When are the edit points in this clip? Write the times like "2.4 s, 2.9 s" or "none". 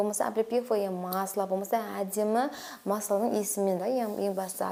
none